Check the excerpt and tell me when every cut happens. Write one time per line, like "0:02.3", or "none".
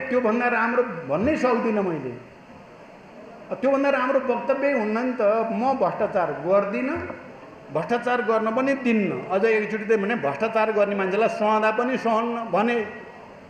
none